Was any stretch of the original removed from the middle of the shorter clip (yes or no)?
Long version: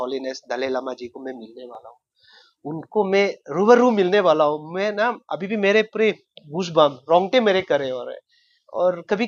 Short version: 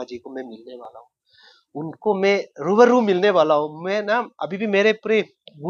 no